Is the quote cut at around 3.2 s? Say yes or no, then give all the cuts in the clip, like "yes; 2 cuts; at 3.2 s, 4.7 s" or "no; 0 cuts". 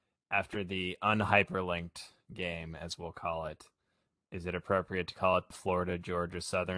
no; 1 cut; at 5.5 s